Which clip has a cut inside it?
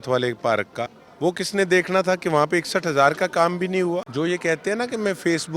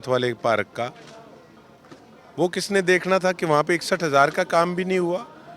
first; 2 cuts; at 1.0 s, 4.1 s

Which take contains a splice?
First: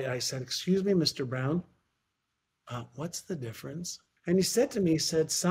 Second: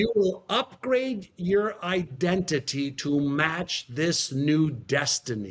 first; 1 cut; at 4.0 s

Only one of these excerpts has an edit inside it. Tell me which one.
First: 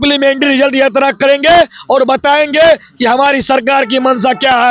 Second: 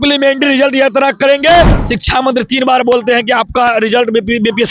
second; 1 cut; at 1.8 s

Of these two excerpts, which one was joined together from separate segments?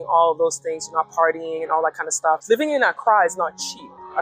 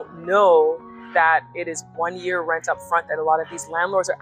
first; 1 cut; at 2.4 s

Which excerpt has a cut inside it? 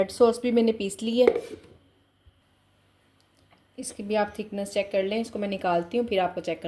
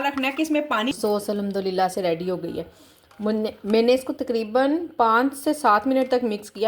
second; 1 cut; at 0.9 s

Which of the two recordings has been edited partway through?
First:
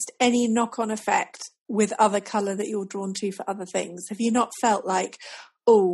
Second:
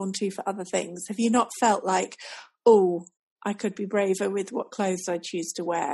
first; 1 cut; at 1.6 s

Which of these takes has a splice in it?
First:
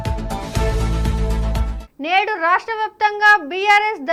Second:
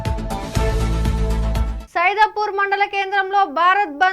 second; 1 cut; at 1.8 s

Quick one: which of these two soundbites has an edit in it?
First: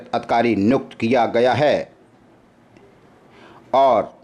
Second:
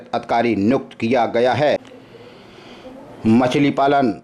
second; 1 cut; at 1.8 s

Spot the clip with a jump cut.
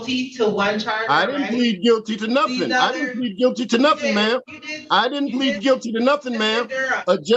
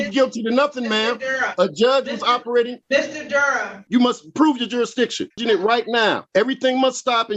second; 4 cuts; at 2.8 s, 3.9 s, 5.3 s, 6.2 s

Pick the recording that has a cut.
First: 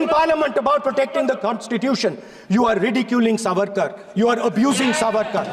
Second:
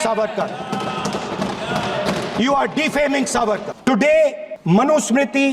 second; 2 cuts; at 3.7 s, 4.5 s

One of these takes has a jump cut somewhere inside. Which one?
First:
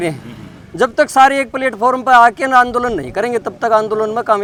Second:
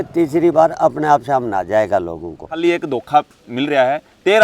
second; 1 cut; at 2.5 s

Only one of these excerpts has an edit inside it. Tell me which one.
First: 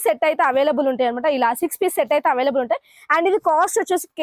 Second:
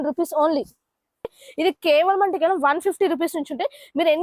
second; 1 cut; at 1.4 s

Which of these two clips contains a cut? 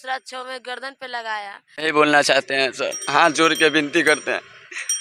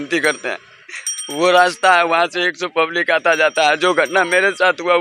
first; 1 cut; at 1.7 s

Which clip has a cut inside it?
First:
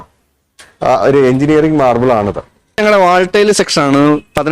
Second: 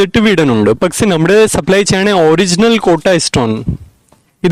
first; 1 cut; at 2.8 s

